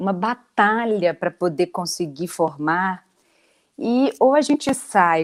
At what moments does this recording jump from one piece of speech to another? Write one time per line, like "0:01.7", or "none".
none